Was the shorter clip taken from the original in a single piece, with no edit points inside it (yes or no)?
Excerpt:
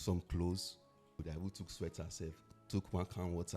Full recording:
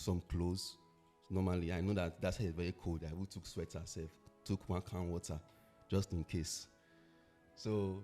no